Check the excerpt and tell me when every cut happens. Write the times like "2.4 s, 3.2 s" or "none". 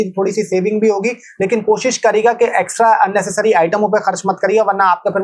none